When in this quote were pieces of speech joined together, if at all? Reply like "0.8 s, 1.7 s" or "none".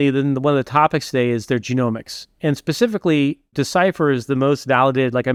none

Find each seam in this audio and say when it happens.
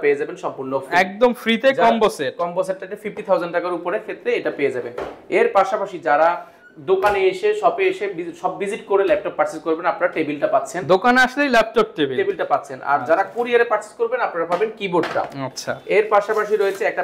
none

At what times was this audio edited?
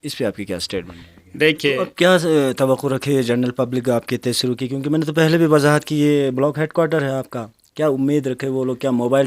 1.8 s

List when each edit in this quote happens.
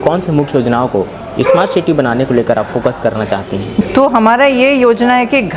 3.8 s

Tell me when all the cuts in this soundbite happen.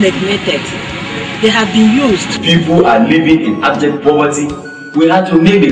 2.4 s

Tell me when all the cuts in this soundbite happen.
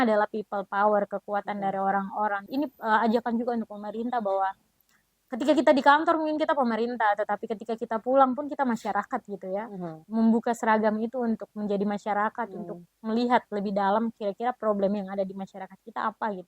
2.5 s, 10.0 s

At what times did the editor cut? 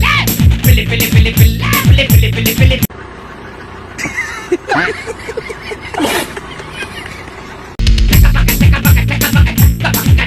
none

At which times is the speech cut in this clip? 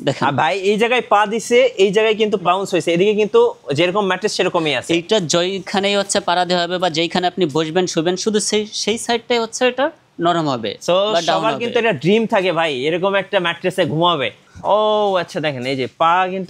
2.4 s, 14.4 s

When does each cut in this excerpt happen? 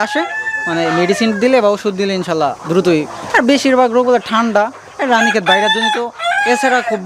none

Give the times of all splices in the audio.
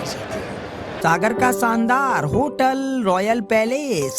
0.9 s

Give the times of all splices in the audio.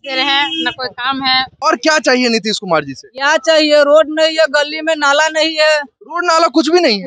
1.5 s

